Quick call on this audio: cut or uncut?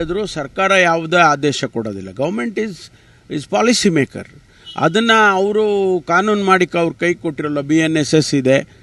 uncut